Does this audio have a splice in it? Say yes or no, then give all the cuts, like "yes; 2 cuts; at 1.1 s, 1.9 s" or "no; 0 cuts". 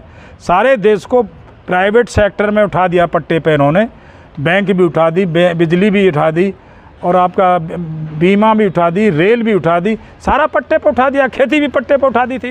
no; 0 cuts